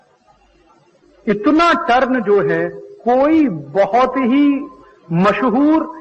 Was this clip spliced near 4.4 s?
yes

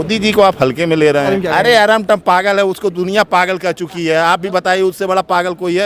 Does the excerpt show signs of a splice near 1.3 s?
yes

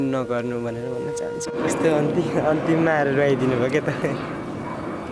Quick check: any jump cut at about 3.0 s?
no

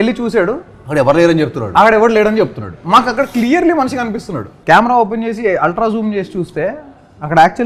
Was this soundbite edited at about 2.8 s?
no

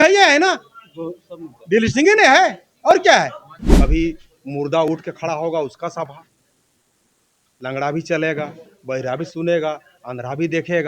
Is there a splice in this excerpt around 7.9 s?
no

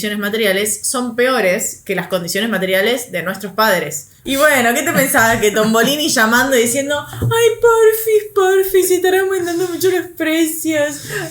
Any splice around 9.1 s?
no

